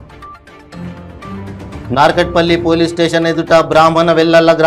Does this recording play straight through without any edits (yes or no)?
no